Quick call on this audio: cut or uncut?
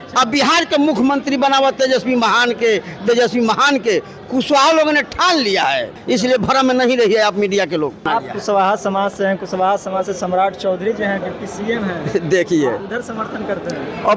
cut